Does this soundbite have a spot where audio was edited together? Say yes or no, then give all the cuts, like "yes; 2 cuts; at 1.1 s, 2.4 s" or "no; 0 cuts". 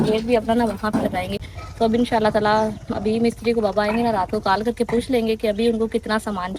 no; 0 cuts